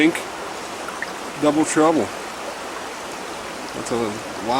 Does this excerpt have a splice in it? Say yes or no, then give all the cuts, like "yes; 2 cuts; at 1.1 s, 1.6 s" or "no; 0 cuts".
no; 0 cuts